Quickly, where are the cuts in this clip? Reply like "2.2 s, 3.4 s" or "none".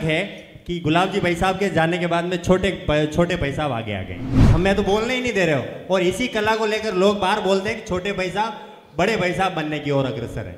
4.3 s